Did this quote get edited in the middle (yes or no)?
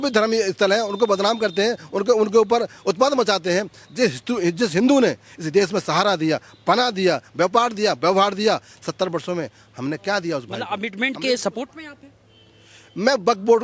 yes